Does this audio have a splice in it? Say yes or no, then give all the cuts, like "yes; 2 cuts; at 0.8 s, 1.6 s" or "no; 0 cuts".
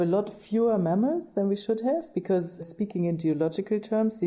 yes; 1 cut; at 2.7 s